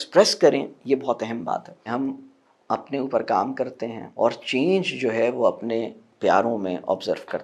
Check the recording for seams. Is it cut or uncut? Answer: cut